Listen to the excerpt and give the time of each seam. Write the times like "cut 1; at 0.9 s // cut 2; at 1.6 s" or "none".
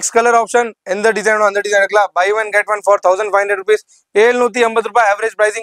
none